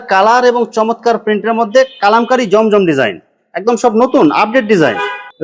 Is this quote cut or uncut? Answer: uncut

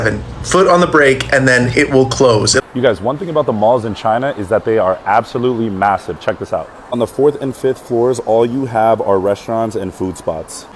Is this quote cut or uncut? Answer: cut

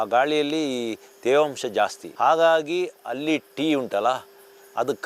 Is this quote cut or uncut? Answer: uncut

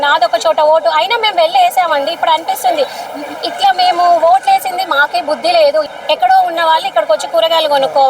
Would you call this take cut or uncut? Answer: cut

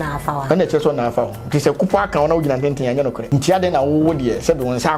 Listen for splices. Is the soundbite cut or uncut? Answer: cut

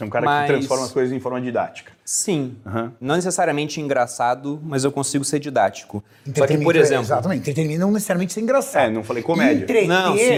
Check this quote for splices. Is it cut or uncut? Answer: uncut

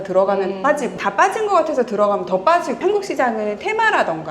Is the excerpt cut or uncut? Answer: cut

